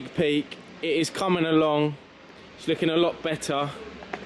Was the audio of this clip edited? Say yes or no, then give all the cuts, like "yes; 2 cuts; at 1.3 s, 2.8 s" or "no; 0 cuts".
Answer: no; 0 cuts